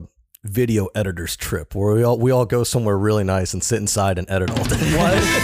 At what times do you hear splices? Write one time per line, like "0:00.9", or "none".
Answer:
none